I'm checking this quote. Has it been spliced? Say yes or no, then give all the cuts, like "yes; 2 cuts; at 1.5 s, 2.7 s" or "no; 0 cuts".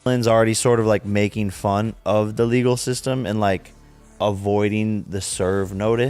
no; 0 cuts